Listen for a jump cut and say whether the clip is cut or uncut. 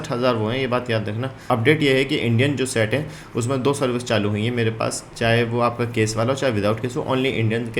cut